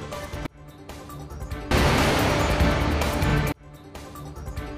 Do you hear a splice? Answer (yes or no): no